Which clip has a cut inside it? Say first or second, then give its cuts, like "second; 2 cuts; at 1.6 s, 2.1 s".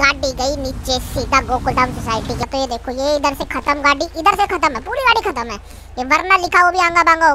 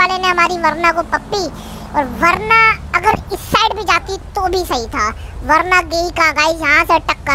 first; 1 cut; at 2.5 s